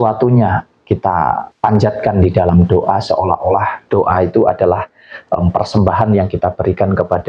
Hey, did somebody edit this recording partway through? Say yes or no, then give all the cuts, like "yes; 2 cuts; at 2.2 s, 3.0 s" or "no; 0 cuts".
yes; 1 cut; at 1.5 s